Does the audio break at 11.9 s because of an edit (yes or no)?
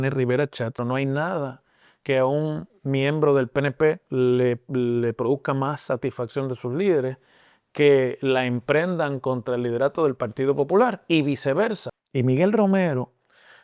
yes